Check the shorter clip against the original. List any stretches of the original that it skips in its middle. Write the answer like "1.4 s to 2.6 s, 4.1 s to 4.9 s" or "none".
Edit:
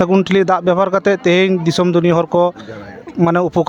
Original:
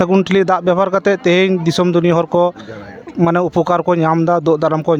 none